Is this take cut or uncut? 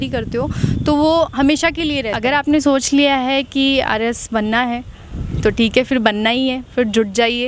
cut